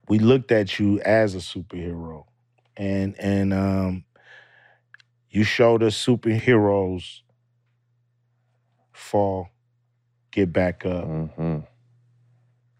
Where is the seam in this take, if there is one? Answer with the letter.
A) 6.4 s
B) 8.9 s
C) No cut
A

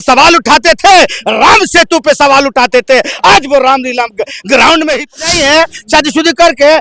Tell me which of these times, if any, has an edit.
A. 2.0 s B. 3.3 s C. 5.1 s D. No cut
C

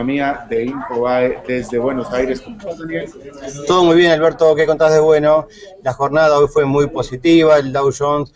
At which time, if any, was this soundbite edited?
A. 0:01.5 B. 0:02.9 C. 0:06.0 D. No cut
B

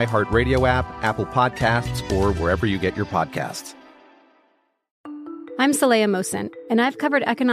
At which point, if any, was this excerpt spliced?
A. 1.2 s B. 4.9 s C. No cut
B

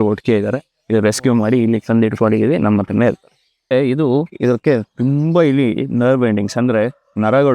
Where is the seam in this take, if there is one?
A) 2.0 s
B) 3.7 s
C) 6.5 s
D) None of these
B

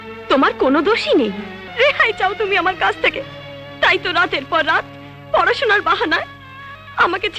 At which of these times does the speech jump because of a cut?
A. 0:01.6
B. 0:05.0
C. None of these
A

